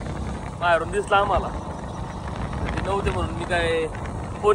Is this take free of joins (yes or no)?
yes